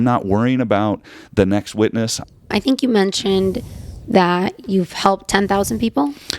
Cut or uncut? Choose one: cut